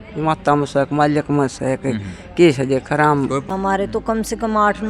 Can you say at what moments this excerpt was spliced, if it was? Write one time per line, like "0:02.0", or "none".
0:03.5